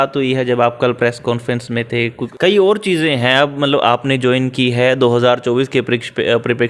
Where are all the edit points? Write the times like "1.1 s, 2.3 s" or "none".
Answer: 2.2 s